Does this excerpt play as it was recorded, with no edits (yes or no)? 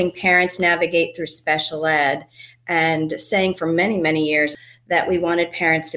no